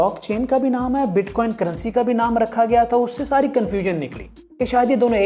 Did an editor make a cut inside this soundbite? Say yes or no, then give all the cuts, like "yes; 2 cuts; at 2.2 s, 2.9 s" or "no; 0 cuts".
no; 0 cuts